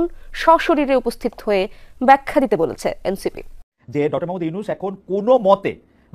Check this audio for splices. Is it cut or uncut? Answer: cut